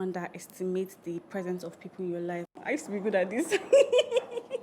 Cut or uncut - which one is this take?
cut